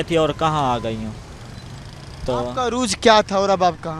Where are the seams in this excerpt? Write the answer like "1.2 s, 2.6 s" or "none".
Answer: none